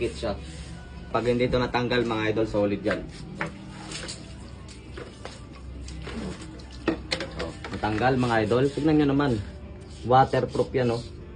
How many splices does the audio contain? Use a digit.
1